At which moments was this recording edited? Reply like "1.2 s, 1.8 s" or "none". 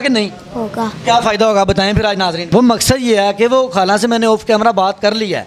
2.4 s